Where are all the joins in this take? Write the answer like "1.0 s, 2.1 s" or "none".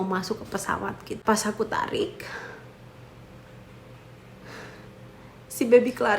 1.2 s

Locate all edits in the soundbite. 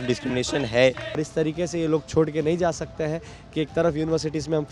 1.1 s

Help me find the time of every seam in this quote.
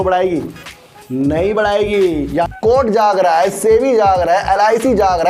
2.3 s

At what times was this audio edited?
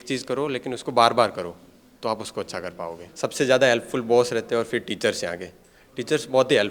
3.0 s

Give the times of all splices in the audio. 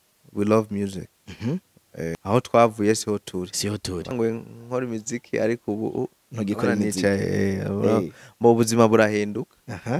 2.2 s, 4.1 s

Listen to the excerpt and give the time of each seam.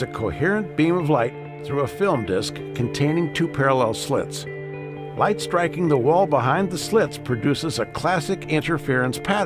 1.5 s

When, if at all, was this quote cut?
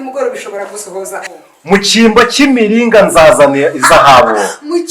1.3 s

